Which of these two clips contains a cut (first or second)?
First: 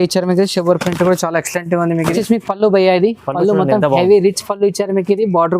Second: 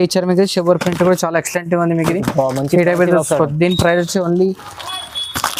first